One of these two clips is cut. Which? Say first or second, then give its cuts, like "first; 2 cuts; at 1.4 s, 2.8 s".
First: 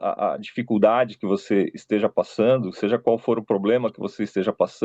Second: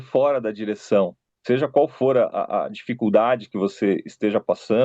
second; 1 cut; at 1.3 s